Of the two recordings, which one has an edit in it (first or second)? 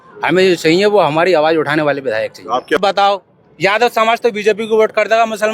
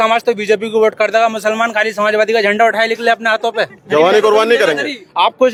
first